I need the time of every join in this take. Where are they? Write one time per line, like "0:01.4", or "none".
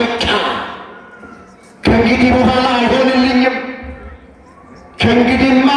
none

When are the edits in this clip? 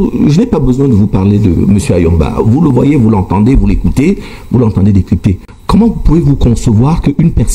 none

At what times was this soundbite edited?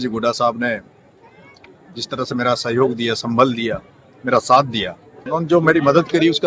0:05.1

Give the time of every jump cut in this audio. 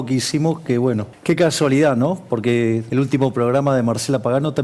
0:01.1
0:02.8

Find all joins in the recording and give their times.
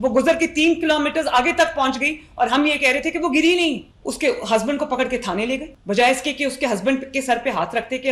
0:04.0
0:05.7

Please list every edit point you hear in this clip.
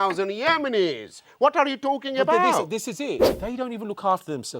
0:03.3

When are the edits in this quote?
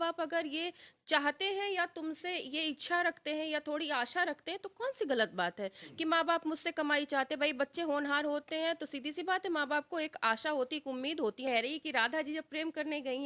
0:11.5

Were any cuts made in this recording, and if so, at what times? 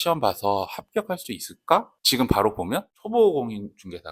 0:02.9

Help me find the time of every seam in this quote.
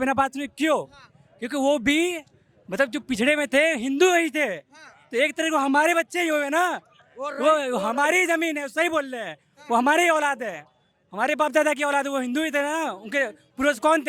none

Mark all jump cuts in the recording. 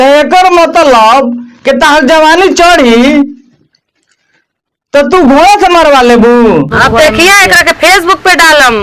0:06.7

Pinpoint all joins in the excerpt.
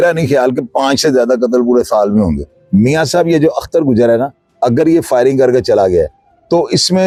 none

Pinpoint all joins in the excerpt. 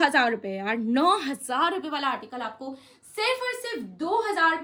none

